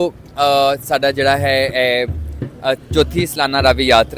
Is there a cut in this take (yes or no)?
no